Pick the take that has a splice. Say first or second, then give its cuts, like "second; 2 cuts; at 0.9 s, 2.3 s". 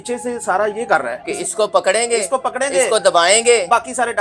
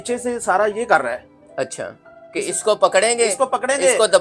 first; 1 cut; at 1.2 s